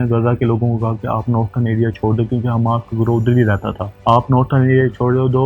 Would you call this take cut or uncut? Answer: uncut